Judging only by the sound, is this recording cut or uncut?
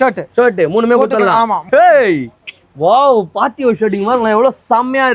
cut